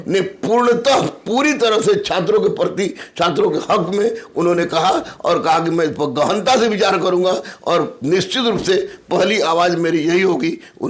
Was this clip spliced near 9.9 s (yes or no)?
no